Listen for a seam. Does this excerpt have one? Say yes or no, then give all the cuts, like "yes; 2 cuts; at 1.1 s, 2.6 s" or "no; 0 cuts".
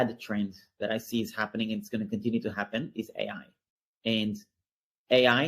no; 0 cuts